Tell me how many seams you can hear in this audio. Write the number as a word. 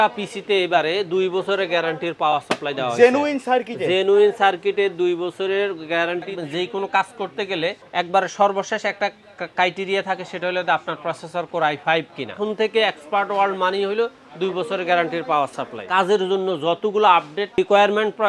four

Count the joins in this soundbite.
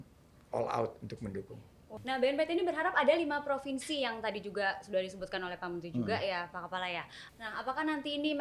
two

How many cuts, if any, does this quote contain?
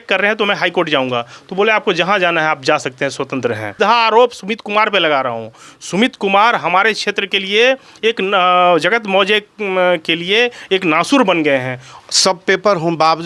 two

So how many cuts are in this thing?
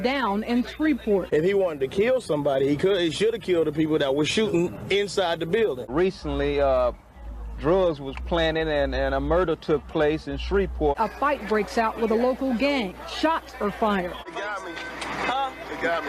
four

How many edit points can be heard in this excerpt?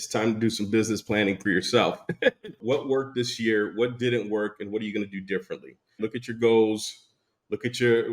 three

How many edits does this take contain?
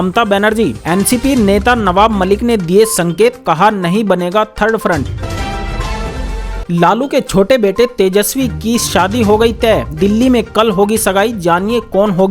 two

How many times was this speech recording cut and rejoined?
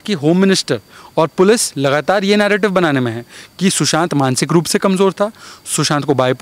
zero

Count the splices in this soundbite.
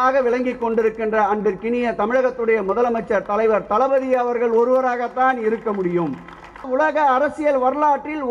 one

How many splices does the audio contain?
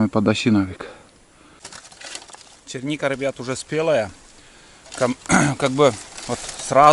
one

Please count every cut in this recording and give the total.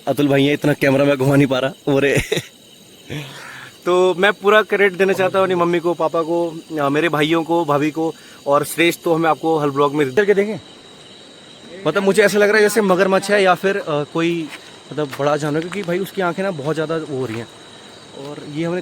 one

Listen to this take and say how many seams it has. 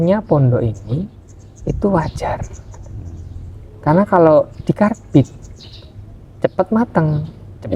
zero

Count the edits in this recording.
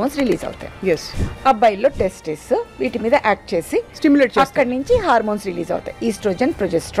one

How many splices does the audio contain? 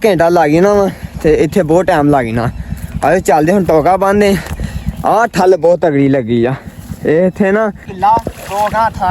one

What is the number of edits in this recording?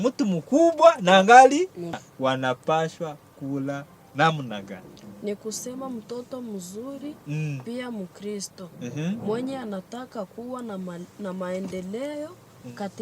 one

